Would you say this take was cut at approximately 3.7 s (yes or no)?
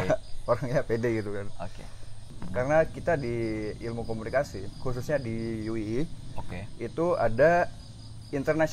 no